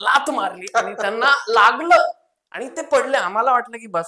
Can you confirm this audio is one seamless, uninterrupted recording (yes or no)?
yes